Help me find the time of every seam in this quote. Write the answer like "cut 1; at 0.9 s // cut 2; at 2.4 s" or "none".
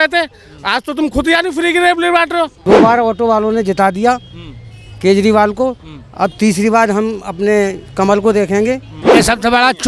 cut 1; at 2.6 s // cut 2; at 8.9 s

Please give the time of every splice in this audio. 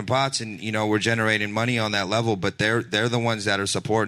none

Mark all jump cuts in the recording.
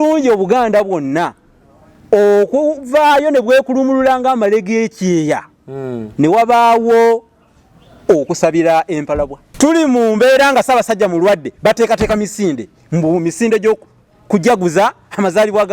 cut 1; at 9.4 s

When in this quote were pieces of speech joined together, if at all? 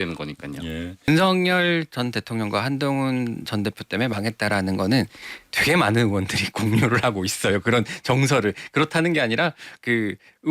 cut 1; at 1.1 s

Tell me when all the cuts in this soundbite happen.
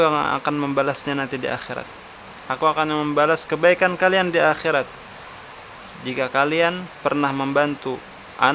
none

